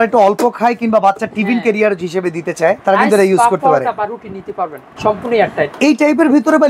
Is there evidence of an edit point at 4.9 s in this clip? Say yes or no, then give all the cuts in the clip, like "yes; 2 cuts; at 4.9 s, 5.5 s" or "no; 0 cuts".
yes; 2 cuts; at 2.8 s, 4.9 s